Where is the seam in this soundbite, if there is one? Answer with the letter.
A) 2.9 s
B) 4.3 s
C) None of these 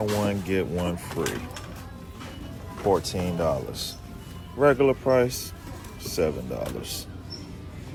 C